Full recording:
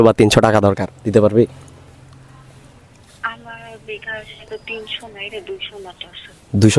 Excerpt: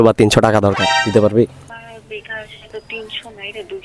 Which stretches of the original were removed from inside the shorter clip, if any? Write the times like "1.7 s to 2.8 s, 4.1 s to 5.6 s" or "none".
1.7 s to 3.4 s

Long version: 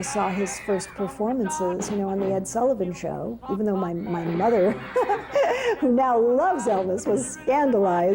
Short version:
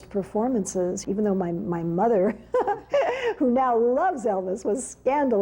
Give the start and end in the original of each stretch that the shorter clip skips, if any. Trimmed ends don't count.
1.8 s to 3.4 s

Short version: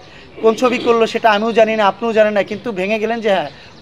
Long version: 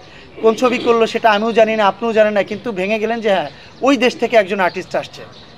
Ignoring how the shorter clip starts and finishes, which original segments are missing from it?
none

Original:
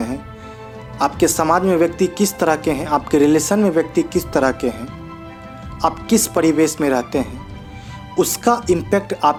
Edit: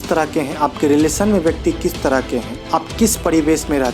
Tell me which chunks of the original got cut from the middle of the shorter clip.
4.9 s to 5.7 s

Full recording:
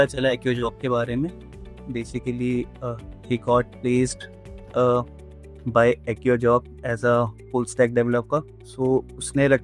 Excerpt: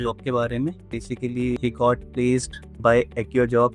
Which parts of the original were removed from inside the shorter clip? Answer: 1.8 s to 2.9 s, 4.3 s to 5.5 s

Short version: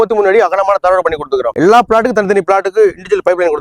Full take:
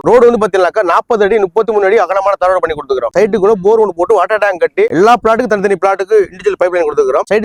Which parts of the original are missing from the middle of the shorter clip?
3.1 s to 4.9 s

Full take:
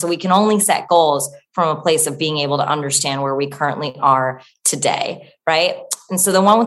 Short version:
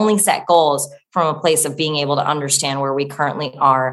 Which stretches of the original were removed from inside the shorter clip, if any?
none

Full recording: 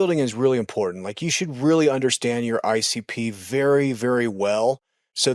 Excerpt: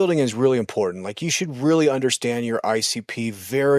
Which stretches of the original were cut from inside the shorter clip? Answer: none

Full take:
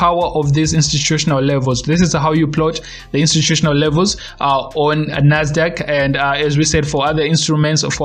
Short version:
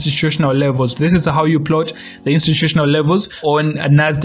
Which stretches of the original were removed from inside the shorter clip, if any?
4.2 s to 4.7 s

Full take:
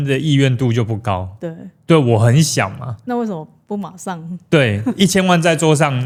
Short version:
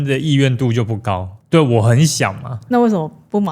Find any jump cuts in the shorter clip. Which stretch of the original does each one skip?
1.3 s to 1.7 s

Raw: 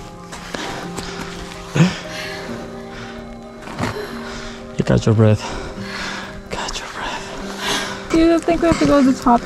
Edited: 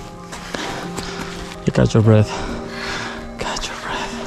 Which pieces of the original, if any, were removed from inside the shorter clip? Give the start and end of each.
1.6 s to 4.7 s

